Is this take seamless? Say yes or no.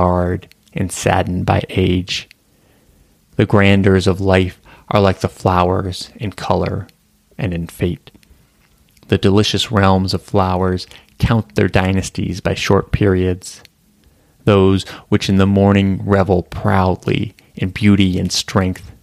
yes